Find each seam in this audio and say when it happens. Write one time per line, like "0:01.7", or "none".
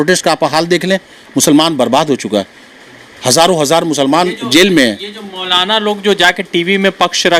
none